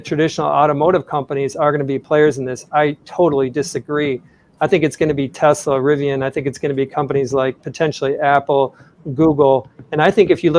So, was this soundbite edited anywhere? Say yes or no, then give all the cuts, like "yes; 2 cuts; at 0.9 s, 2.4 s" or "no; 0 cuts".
no; 0 cuts